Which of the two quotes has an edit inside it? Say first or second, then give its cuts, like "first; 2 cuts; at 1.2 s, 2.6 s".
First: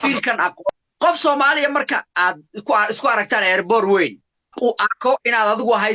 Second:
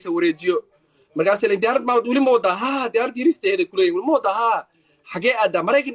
first; 2 cuts; at 0.7 s, 4.5 s